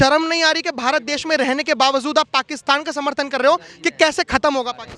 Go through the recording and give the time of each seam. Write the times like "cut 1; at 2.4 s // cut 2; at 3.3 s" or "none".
none